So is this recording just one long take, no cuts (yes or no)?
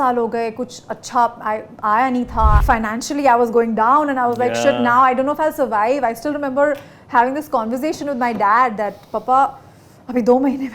no